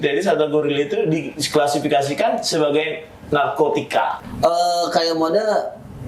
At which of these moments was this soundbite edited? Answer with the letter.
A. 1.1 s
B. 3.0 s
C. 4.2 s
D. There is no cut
C